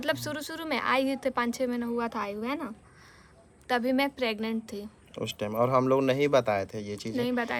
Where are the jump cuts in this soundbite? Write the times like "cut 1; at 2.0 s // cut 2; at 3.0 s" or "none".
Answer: none